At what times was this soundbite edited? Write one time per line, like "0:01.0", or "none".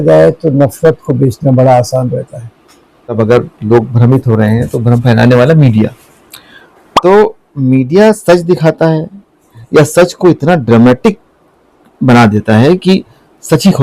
0:03.1